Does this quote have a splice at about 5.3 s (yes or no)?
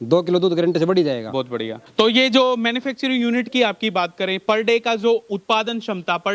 no